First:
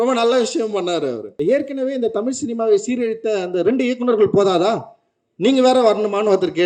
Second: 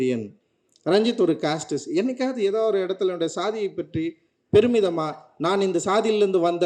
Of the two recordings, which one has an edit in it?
first; 1 cut; at 1.3 s

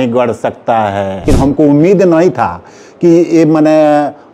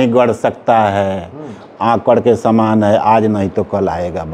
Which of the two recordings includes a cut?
first; 1 cut; at 1.3 s

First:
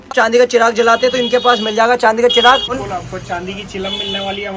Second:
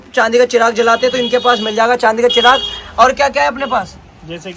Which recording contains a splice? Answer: first; 1 cut; at 2.8 s

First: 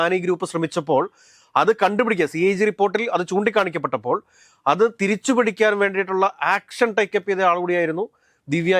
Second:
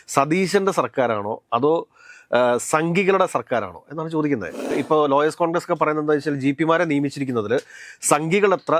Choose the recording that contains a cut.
second; 1 cut; at 4.7 s

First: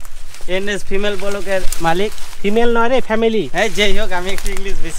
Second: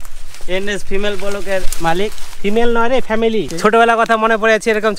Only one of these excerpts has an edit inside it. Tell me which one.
second; 1 cut; at 3.5 s

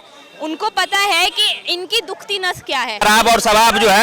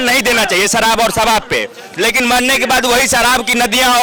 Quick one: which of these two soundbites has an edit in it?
first; 1 cut; at 3.0 s

